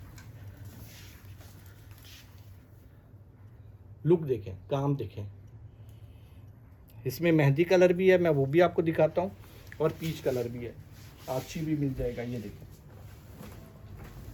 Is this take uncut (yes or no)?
yes